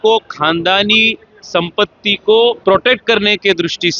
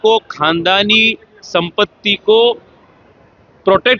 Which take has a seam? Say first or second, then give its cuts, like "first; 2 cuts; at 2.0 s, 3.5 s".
first; 1 cut; at 2.6 s